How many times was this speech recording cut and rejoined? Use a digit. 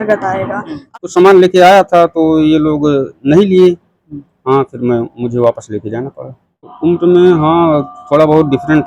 2